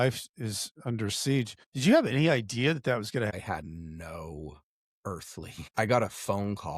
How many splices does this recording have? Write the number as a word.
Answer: three